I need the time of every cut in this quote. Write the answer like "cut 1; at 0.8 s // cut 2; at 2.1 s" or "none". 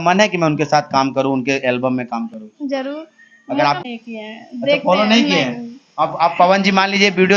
cut 1; at 3.8 s